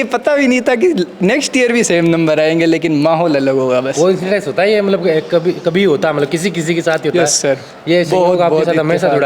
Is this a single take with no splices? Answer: yes; 0 cuts

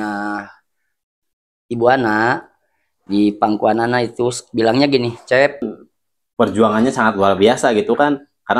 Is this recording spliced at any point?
yes; 1 cut; at 5.7 s

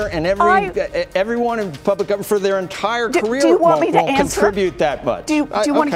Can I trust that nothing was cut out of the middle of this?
yes; 0 cuts

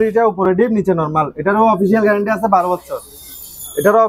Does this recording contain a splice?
no; 0 cuts

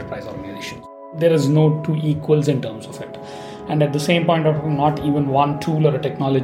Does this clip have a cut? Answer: yes; 1 cut; at 1.1 s

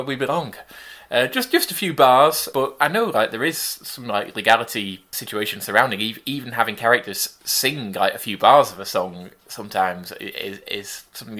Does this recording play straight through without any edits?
no; 1 cut; at 2.4 s

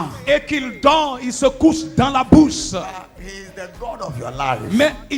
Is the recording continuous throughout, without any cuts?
yes; 0 cuts

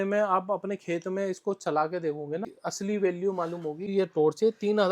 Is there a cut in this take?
yes; 2 cuts; at 2.6 s, 3.9 s

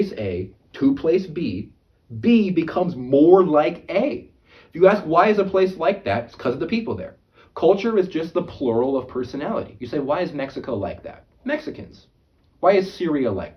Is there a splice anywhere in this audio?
no; 0 cuts

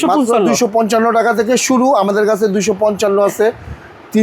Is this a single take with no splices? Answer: yes; 0 cuts

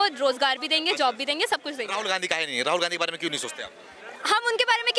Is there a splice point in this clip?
no; 0 cuts

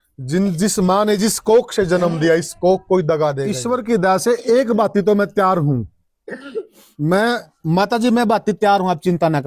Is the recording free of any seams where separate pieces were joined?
no; 1 cut; at 3.6 s

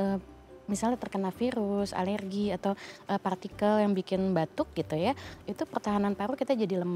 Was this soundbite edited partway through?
no; 0 cuts

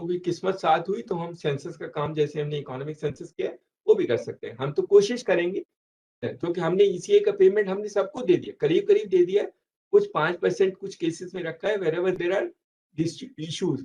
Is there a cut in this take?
yes; 1 cut; at 6.2 s

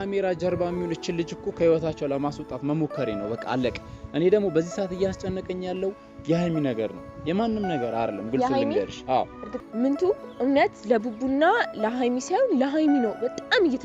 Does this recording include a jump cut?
yes; 1 cut; at 9.4 s

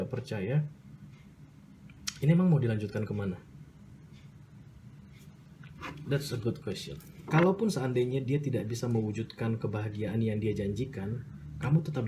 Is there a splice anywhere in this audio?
yes; 1 cut; at 7.1 s

